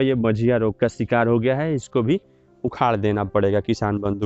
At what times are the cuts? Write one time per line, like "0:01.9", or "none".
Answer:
none